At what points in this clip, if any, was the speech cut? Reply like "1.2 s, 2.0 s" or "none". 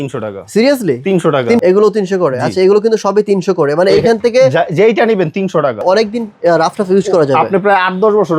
1.6 s, 5.8 s